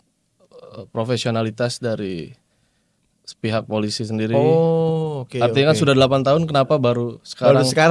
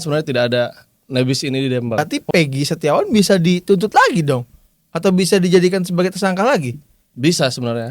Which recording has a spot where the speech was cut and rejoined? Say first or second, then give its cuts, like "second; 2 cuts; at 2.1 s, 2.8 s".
second; 1 cut; at 2.0 s